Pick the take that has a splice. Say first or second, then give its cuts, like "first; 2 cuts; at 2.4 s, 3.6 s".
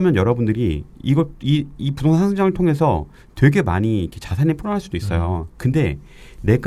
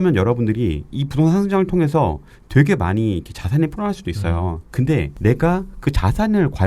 second; 2 cuts; at 0.9 s, 5.1 s